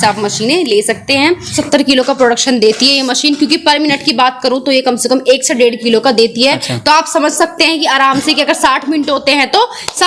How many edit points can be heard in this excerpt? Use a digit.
1